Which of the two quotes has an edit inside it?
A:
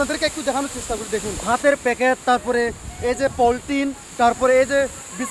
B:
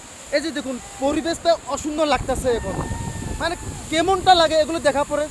A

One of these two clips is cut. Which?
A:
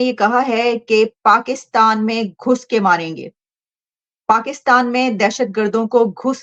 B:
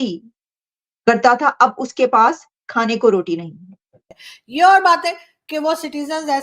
B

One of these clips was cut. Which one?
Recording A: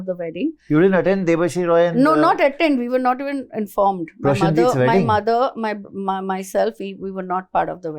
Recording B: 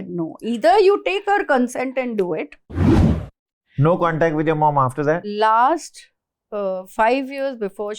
B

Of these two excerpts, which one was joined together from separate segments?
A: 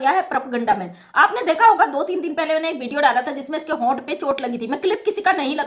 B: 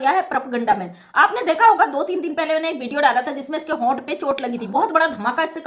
B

